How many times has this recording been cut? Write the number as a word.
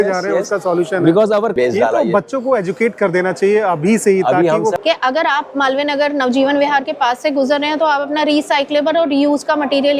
two